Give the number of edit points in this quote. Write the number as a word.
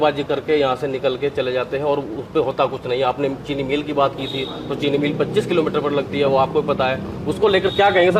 zero